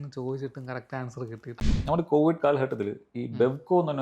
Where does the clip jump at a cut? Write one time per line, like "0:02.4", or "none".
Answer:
0:01.6